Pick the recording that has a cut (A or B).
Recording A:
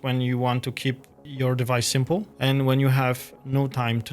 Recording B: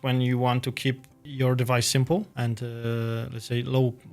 A